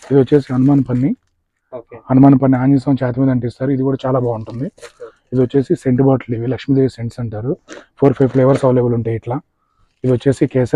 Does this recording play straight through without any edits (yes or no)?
yes